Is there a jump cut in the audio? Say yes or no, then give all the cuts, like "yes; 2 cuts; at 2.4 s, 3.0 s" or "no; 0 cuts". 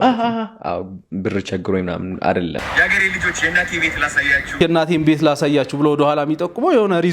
yes; 2 cuts; at 2.6 s, 4.5 s